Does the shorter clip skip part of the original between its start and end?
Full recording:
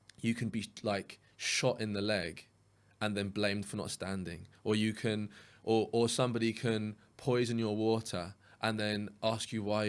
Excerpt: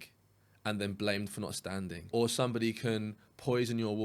yes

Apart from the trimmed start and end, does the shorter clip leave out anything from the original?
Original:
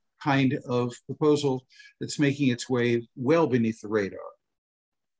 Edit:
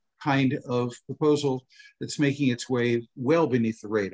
no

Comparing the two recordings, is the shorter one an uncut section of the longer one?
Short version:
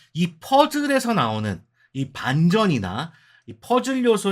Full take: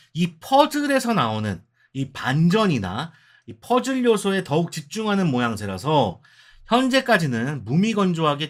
yes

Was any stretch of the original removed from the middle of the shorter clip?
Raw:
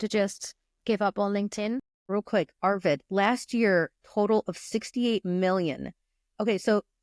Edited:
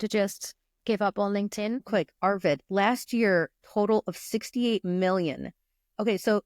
yes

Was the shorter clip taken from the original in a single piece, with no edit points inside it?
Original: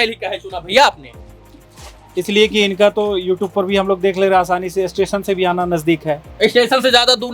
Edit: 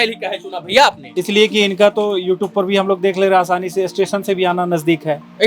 no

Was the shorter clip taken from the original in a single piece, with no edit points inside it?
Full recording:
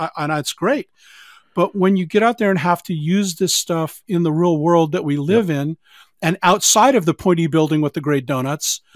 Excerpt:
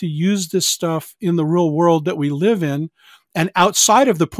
yes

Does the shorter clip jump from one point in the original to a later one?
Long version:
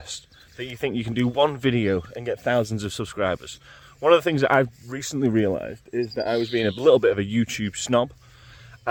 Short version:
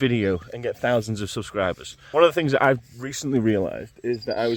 yes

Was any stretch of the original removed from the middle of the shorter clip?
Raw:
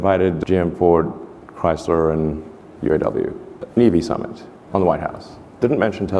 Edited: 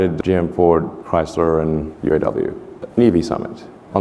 yes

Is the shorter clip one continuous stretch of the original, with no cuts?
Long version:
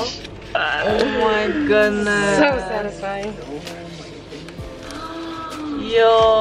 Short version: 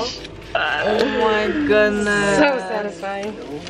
yes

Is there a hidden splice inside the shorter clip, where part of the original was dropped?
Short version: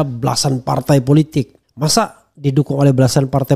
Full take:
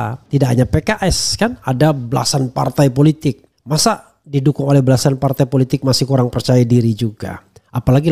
no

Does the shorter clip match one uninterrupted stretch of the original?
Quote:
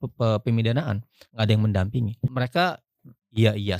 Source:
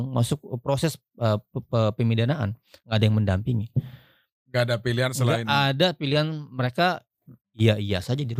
no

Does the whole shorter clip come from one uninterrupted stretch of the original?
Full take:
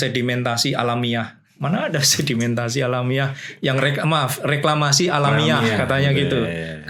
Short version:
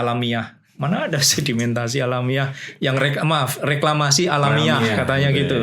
yes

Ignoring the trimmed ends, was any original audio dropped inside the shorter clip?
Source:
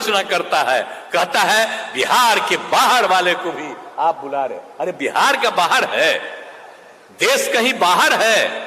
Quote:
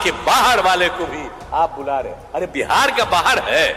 no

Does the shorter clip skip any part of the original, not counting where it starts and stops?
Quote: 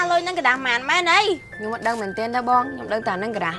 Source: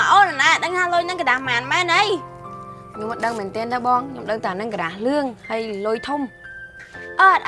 yes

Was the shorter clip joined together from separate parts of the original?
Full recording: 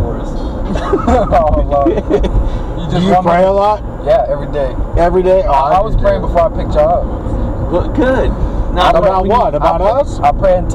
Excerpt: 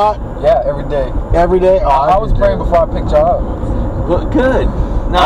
no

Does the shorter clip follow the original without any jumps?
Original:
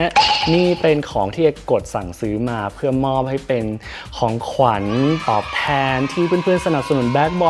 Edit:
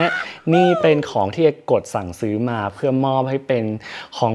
yes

